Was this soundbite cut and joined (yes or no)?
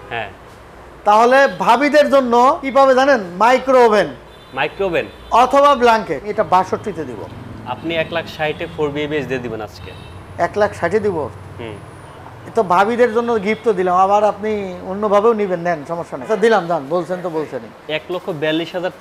yes